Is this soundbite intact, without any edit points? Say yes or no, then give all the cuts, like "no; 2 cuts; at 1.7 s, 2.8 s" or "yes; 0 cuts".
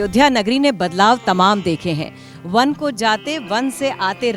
yes; 0 cuts